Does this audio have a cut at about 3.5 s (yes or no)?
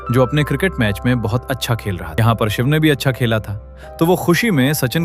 no